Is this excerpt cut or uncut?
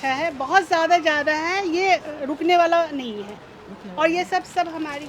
uncut